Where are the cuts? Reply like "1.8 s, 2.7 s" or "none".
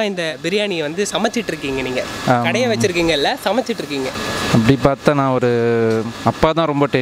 none